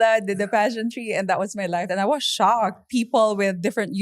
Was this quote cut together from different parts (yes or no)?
yes